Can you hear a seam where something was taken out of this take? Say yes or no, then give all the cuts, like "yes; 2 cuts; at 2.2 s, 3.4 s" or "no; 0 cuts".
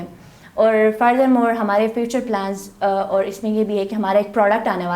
no; 0 cuts